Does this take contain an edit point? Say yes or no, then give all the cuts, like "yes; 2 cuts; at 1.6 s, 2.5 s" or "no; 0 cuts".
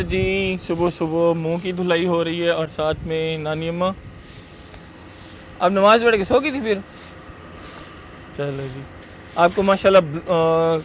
no; 0 cuts